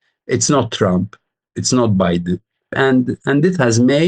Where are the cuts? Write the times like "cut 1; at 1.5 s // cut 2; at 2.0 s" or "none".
cut 1; at 2.7 s

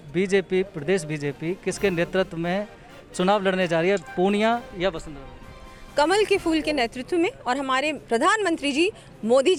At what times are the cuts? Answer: none

